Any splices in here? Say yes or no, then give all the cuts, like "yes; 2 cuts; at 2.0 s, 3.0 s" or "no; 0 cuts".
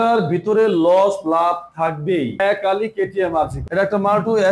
yes; 2 cuts; at 2.3 s, 3.6 s